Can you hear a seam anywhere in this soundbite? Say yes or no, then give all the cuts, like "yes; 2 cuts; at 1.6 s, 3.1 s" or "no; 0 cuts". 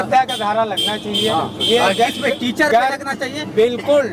no; 0 cuts